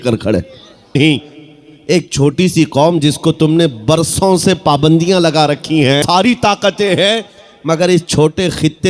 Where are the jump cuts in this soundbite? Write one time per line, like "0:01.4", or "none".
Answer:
0:01.0
0:06.0